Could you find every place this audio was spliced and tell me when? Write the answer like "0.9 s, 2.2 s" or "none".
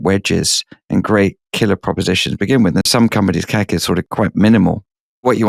2.9 s